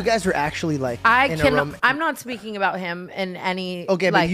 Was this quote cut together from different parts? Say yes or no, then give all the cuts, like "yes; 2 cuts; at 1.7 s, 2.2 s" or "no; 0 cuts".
yes; 1 cut; at 0.9 s